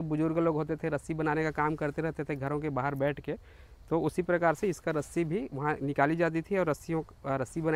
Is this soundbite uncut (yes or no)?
yes